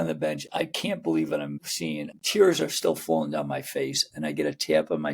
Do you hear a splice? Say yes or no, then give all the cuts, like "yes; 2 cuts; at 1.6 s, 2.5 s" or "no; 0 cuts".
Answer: yes; 1 cut; at 2.0 s